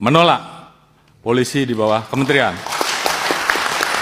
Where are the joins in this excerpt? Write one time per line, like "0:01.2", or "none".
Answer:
none